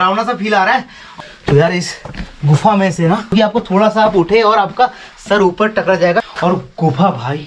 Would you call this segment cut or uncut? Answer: cut